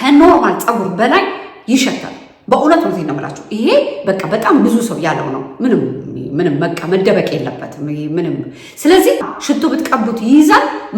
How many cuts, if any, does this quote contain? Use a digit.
1